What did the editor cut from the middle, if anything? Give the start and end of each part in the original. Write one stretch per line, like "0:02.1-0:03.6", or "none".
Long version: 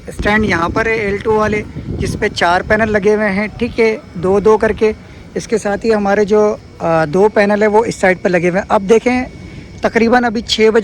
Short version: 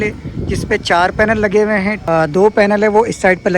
0:03.5-0:06.8